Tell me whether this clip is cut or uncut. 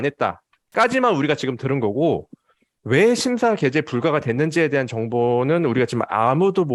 uncut